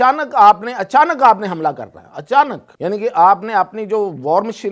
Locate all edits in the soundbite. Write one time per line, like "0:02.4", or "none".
0:02.7